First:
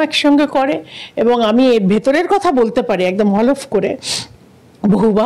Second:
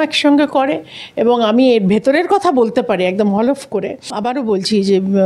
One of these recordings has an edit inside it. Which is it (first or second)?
second